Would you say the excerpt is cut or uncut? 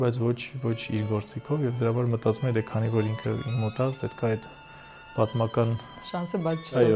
uncut